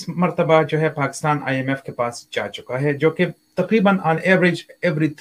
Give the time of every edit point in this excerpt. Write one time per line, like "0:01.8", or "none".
none